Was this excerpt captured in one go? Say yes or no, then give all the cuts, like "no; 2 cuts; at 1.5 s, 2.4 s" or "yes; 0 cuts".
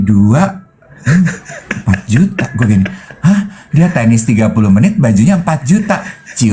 yes; 0 cuts